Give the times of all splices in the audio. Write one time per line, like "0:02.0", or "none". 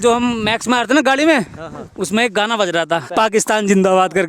0:03.1